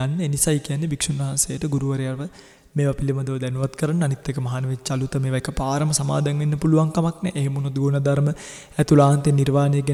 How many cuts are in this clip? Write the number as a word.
zero